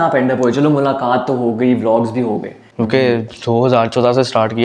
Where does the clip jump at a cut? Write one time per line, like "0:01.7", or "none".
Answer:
0:02.6